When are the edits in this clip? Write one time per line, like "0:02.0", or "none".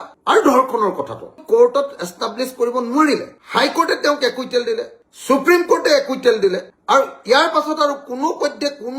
0:01.3